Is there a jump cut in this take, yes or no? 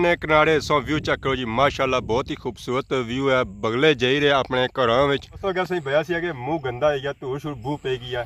yes